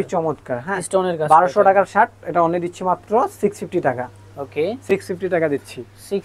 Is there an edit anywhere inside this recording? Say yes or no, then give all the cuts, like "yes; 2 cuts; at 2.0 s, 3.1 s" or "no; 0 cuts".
no; 0 cuts